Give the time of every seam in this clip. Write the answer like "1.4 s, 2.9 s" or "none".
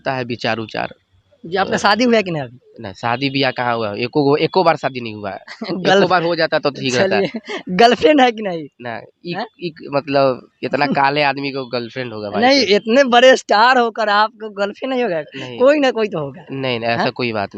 none